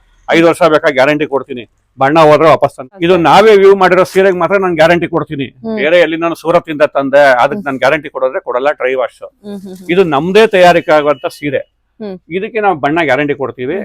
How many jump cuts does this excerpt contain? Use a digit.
1